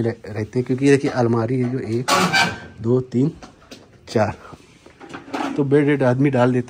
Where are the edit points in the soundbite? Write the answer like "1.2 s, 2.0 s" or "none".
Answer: none